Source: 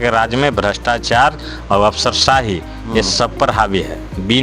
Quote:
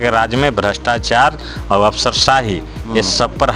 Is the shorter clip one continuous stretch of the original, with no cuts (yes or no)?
yes